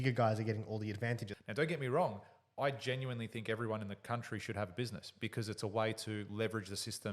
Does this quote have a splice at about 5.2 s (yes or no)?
no